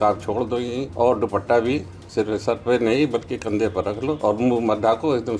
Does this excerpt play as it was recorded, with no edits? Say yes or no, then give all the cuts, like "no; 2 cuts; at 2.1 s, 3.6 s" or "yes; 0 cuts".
no; 3 cuts; at 0.8 s, 2.0 s, 4.2 s